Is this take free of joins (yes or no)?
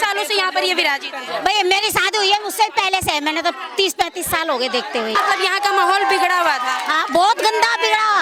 no